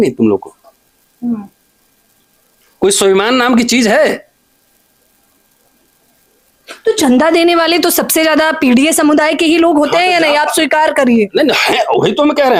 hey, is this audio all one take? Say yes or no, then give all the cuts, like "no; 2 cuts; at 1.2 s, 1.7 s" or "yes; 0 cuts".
yes; 0 cuts